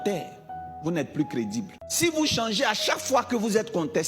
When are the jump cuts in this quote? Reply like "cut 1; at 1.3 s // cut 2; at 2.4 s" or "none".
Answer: cut 1; at 1.8 s